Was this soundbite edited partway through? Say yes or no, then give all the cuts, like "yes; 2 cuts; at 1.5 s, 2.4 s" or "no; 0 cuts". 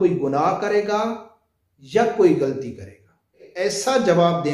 yes; 1 cut; at 3.4 s